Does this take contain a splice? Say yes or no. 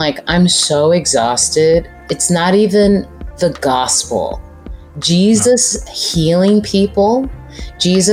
yes